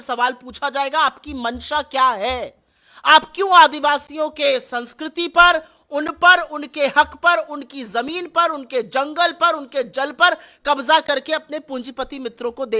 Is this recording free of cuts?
yes; 0 cuts

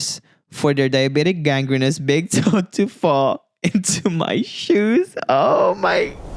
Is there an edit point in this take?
no; 0 cuts

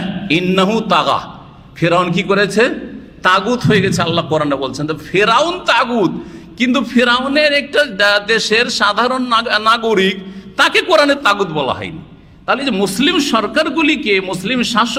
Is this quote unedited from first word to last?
yes; 0 cuts

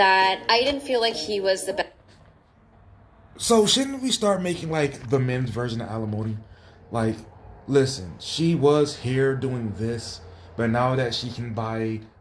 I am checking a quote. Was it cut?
no; 0 cuts

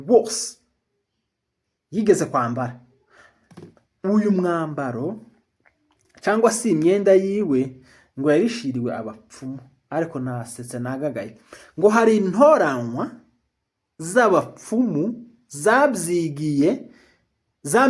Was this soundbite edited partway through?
no; 0 cuts

